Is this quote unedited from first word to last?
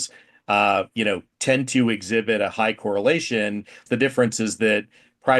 no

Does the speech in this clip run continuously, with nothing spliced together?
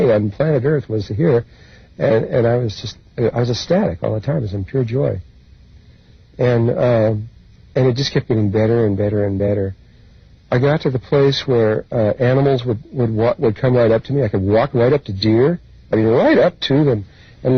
no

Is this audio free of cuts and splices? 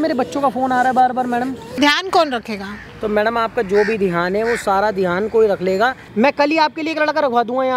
no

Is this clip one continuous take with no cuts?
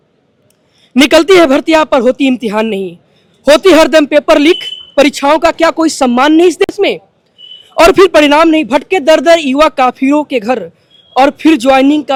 yes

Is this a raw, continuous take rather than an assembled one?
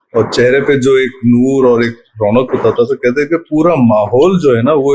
yes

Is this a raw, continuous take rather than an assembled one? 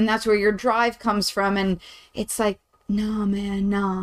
yes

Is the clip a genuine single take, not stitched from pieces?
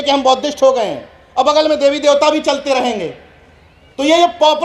yes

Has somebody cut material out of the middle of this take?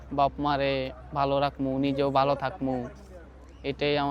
no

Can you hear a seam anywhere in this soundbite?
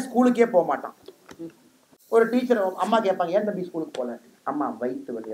no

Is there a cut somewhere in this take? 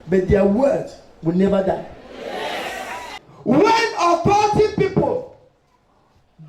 yes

